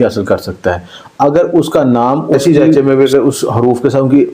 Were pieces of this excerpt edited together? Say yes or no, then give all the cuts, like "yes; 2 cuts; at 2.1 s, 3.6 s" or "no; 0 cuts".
yes; 1 cut; at 2.4 s